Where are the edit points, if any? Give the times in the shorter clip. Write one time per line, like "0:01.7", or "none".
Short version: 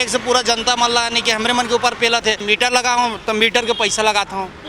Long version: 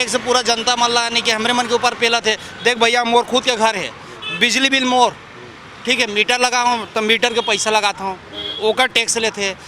0:02.4